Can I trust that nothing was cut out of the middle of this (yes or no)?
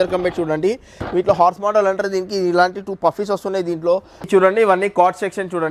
no